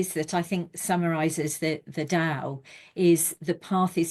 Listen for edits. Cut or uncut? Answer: uncut